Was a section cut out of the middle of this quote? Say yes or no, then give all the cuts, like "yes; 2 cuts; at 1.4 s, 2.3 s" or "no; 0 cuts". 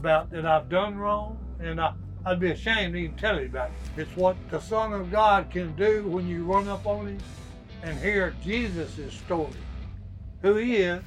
yes; 1 cut; at 3.8 s